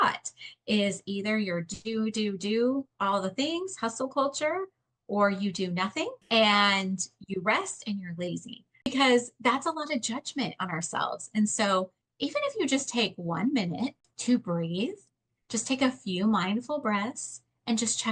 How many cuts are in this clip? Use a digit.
3